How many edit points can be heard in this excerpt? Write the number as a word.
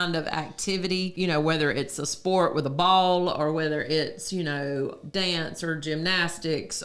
one